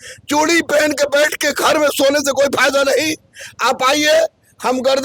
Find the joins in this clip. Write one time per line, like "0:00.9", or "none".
none

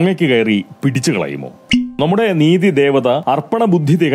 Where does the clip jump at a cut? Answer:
0:01.8
0:03.2

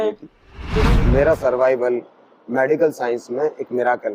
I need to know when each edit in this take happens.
0:00.9

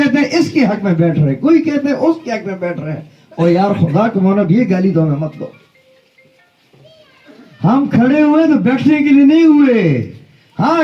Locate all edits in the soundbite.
none

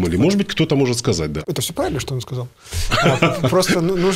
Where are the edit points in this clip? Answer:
0:01.4

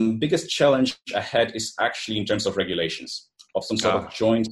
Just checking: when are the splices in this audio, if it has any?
none

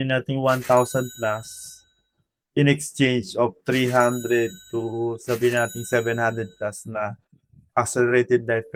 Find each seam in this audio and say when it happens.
none

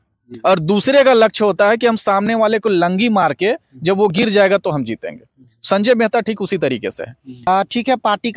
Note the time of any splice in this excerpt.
0:07.3

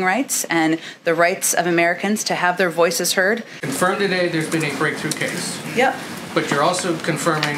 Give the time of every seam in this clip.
0:03.6

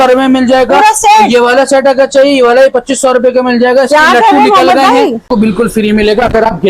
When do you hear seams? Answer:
0:05.3

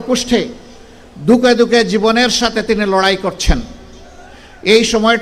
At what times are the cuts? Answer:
none

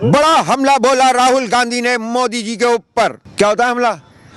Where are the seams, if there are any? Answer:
0:03.2

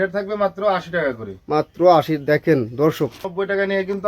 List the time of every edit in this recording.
0:03.2

